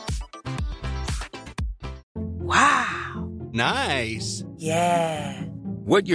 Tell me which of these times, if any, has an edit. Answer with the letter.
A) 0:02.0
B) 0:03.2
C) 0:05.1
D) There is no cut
A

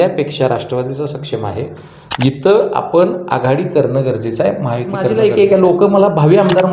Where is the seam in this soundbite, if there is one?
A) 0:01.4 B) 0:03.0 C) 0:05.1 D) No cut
C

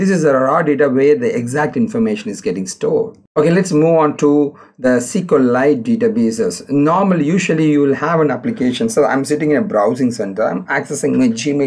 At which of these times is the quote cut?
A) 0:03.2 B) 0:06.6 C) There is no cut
A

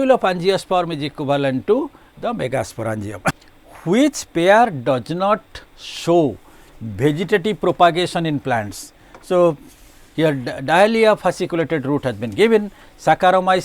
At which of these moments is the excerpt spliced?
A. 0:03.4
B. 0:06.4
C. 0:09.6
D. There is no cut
A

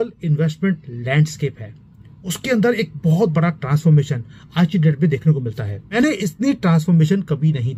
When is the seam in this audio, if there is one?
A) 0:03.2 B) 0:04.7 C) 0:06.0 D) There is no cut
C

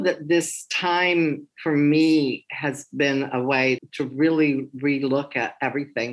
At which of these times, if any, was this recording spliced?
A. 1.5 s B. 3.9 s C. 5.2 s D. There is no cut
D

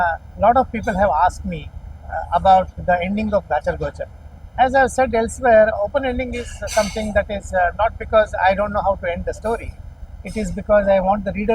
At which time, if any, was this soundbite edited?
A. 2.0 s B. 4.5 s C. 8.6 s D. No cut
B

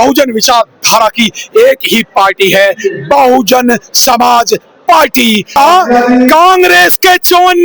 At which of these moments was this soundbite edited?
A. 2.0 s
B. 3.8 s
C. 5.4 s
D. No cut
C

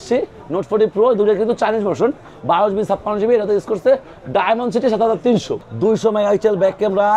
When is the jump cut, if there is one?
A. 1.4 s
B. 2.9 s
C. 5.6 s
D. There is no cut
C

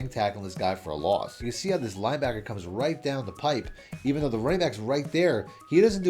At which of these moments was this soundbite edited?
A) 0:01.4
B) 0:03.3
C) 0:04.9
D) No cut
A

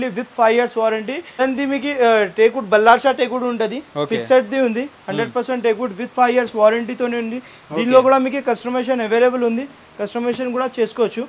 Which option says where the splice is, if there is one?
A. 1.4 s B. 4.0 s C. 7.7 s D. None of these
A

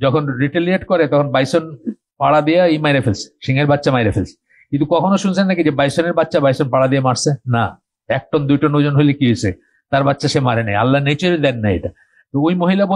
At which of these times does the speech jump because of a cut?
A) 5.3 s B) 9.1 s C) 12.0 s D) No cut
D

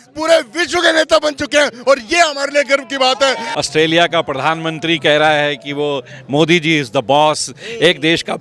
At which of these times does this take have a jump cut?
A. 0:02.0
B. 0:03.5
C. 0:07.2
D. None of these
B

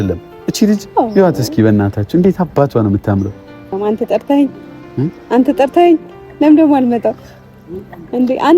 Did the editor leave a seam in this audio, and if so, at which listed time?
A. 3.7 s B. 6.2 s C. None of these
A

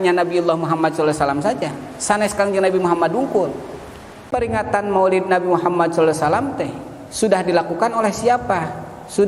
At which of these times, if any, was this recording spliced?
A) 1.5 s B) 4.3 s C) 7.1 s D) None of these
B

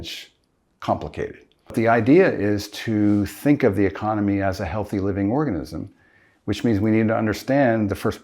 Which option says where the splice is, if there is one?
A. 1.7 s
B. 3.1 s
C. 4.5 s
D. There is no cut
A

